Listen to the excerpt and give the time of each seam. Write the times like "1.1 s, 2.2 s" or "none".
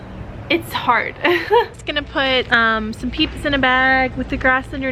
1.7 s

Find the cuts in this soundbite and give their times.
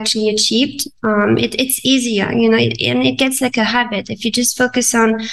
none

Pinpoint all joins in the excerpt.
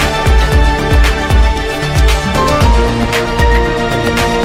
none

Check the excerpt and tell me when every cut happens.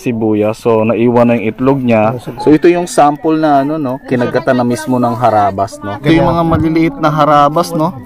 2.3 s, 6.0 s

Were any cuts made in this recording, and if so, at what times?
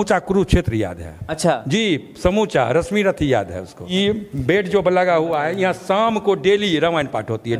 3.9 s

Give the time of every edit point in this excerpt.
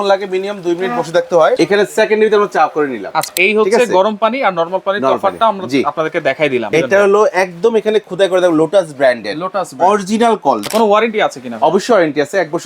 1.6 s, 3.3 s, 6.7 s, 10.7 s

